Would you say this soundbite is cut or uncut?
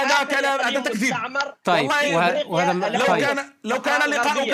uncut